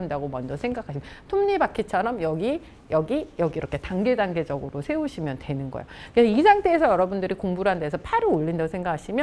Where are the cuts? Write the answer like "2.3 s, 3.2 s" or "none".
none